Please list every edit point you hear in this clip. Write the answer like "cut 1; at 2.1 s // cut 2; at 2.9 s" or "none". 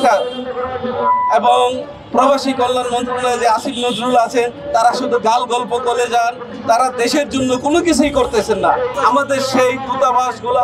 cut 1; at 8.9 s